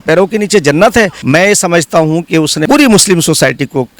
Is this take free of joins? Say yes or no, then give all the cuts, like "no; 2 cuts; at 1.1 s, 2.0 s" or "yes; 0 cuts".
no; 2 cuts; at 1.2 s, 2.6 s